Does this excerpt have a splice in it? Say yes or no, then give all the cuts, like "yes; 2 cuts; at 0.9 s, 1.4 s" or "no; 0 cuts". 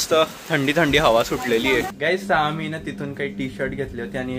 no; 0 cuts